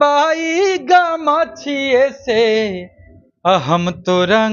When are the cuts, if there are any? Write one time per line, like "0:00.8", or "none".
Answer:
none